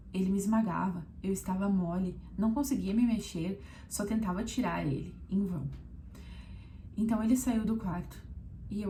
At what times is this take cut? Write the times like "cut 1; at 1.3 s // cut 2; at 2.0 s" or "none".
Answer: none